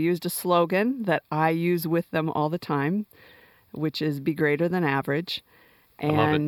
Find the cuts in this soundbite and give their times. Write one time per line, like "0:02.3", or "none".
0:01.2